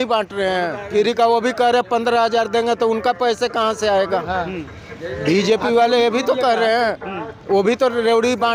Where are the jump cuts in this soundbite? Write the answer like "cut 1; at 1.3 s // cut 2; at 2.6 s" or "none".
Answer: none